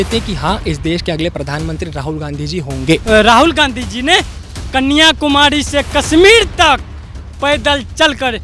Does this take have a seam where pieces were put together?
yes; 1 cut; at 3.0 s

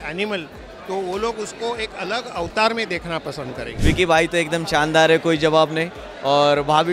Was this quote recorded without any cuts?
no; 1 cut; at 3.6 s

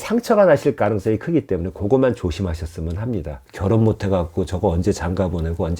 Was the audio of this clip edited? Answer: yes; 1 cut; at 3.4 s

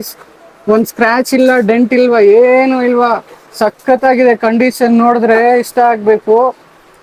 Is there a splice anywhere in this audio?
no; 0 cuts

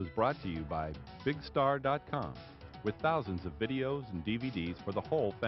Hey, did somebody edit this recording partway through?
no; 0 cuts

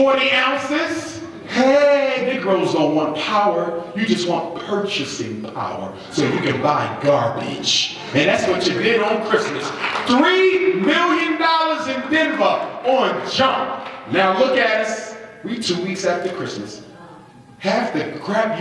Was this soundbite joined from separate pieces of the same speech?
yes; 1 cut; at 2.3 s

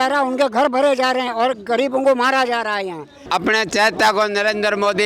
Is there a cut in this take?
yes; 1 cut; at 3.2 s

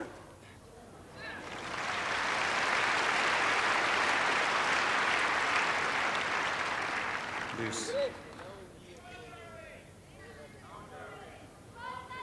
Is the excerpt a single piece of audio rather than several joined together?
yes; 0 cuts

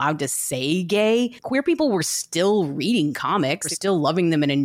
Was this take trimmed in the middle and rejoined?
yes; 2 cuts; at 1.4 s, 3.7 s

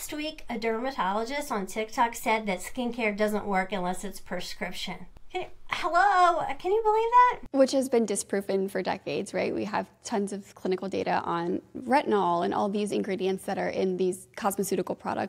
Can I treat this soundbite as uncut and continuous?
no; 3 cuts; at 5.1 s, 7.4 s, 14.3 s

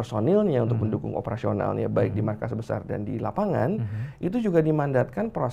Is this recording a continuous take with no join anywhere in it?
yes; 0 cuts

